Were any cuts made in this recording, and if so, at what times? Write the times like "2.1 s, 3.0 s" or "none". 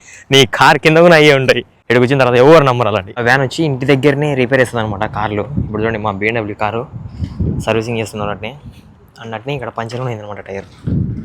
1.7 s, 3.1 s